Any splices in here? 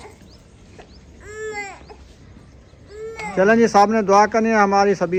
no; 0 cuts

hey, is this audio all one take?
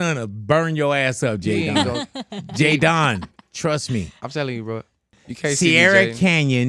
no; 1 cut; at 5.2 s

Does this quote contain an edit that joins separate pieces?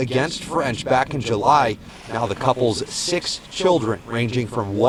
no; 0 cuts

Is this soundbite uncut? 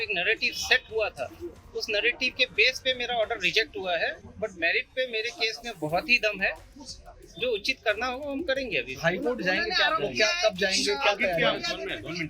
yes; 0 cuts

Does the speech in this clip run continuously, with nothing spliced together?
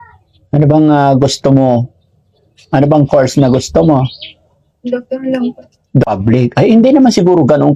no; 1 cut; at 6.1 s

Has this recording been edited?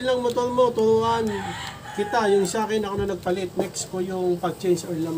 no; 0 cuts

